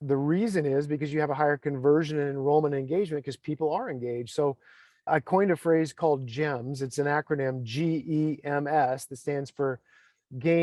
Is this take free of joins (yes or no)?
yes